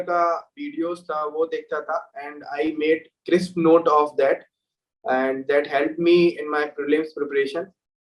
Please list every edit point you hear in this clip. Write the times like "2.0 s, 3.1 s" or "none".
none